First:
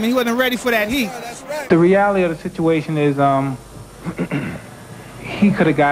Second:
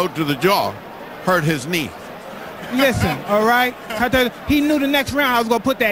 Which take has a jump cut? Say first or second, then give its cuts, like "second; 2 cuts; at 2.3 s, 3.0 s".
first; 1 cut; at 1.6 s